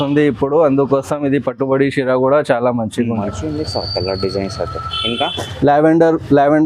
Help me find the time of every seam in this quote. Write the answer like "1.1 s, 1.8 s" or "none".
3.2 s